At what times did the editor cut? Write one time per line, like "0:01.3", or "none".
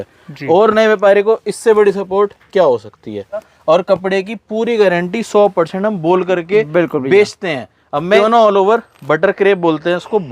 0:03.5
0:08.2